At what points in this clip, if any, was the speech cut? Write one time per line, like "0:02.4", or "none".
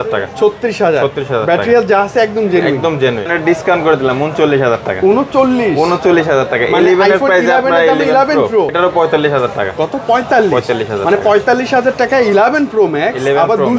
0:03.3
0:08.7